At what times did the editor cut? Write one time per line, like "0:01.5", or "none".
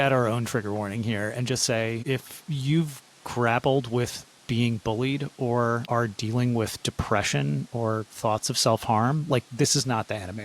0:02.0
0:05.8